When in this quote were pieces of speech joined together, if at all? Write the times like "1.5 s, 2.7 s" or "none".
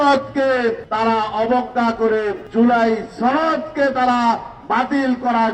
0.8 s, 2.4 s